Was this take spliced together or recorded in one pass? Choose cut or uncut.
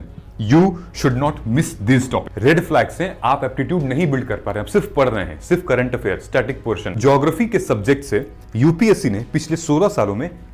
cut